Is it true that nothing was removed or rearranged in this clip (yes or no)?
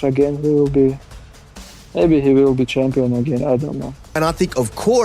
no